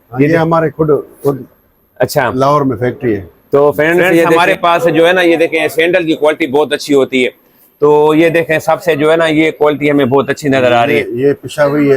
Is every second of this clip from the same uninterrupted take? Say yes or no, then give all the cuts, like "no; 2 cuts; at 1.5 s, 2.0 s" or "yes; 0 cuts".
no; 1 cut; at 4.4 s